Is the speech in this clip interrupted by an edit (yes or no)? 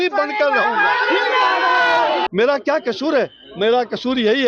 yes